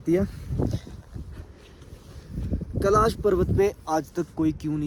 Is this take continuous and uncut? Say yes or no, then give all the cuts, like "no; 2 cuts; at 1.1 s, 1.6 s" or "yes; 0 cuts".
yes; 0 cuts